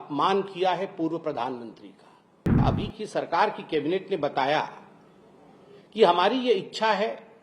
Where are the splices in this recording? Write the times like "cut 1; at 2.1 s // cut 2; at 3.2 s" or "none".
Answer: cut 1; at 2.6 s